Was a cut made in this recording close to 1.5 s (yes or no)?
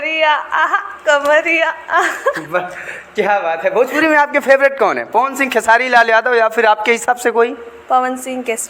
no